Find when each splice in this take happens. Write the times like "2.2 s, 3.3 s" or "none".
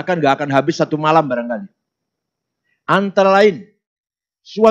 none